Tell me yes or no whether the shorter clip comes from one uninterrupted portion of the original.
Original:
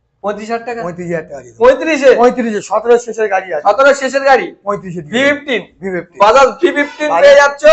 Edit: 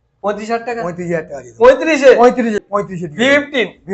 no